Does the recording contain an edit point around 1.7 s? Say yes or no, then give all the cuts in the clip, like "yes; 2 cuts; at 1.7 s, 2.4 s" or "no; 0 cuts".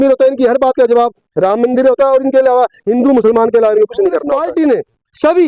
no; 1 cut; at 4.4 s